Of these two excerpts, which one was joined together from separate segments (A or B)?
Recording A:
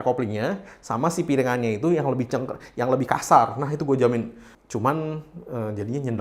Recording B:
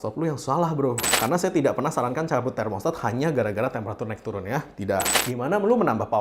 B